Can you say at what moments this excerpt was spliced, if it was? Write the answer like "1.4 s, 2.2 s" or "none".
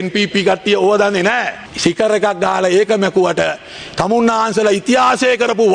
1.7 s

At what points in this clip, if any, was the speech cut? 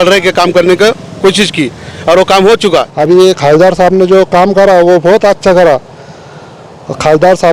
2.9 s

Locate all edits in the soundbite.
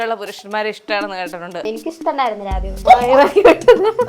1.6 s, 2.8 s

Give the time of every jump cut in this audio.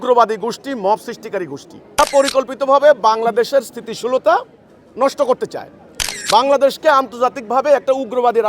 2.0 s

